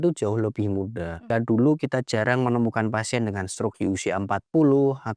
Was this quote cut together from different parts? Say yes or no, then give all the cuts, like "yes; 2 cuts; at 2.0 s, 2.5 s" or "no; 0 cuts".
yes; 1 cut; at 1.3 s